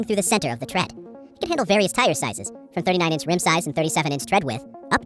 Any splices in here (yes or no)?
no